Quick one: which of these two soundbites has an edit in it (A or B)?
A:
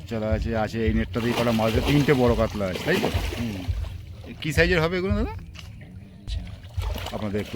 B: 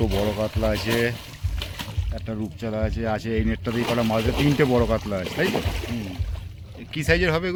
A